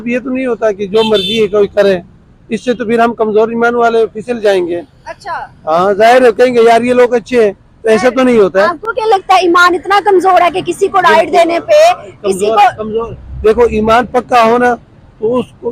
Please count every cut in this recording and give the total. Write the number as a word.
zero